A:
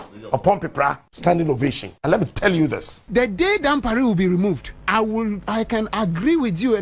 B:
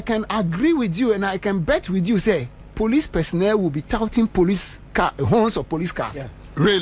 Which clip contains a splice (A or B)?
A